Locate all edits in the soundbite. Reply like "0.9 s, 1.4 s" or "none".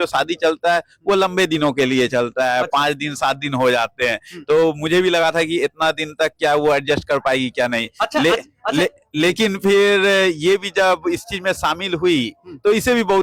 none